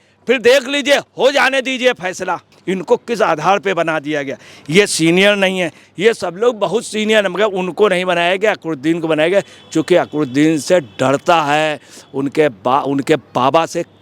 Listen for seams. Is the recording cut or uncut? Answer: cut